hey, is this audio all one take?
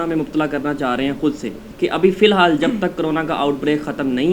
no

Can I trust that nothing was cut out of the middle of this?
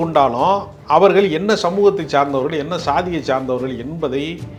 yes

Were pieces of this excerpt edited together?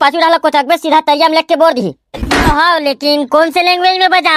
yes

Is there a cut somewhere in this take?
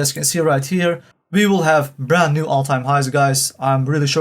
yes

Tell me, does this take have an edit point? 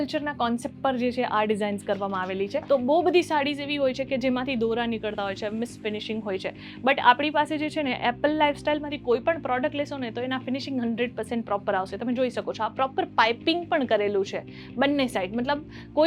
yes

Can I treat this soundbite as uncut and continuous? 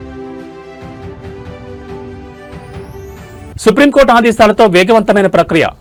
yes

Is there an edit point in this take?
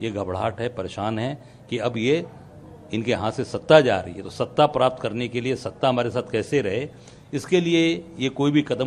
no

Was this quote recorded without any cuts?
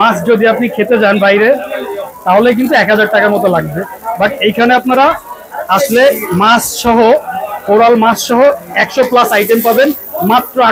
yes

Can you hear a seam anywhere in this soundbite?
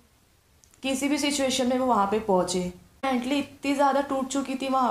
yes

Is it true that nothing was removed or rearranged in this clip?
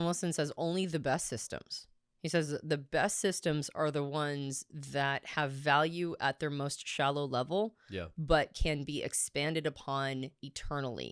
yes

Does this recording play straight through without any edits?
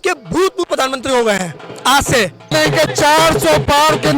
no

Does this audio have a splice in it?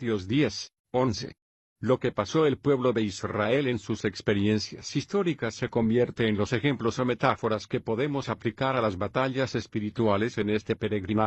no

